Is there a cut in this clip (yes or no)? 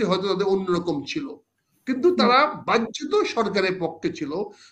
no